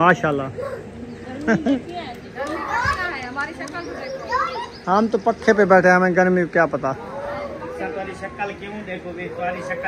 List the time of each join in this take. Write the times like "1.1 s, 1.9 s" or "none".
none

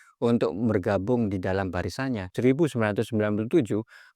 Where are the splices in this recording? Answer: 2.3 s

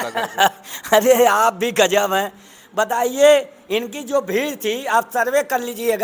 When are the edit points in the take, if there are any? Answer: none

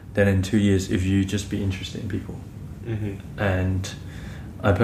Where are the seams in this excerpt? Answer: none

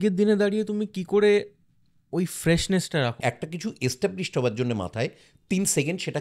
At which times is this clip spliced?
3.2 s

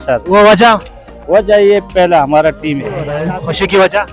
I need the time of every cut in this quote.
3.2 s

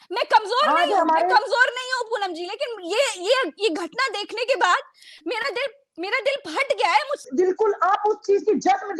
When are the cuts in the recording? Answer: 7.1 s

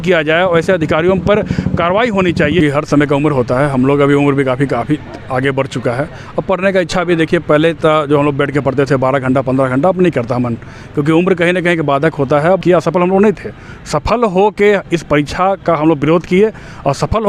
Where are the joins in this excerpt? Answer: 2.6 s, 12.6 s

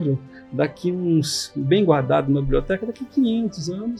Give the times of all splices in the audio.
none

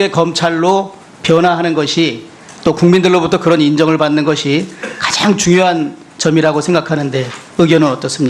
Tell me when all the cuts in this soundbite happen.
3.1 s

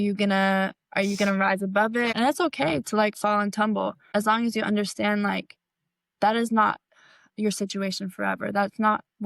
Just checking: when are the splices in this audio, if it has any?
2.1 s, 4.0 s

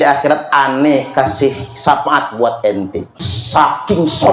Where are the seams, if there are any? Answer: 3.3 s

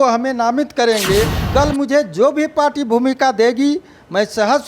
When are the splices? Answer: 1.4 s

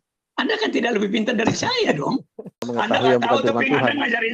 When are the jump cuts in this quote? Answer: 2.7 s

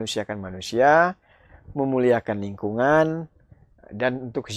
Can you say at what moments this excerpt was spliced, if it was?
none

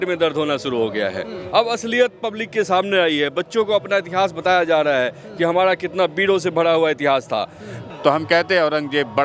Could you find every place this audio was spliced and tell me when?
1.4 s, 7.8 s

